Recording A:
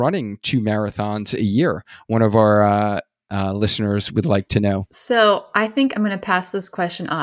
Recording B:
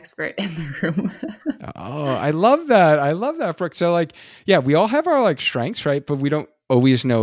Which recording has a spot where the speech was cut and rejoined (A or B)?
A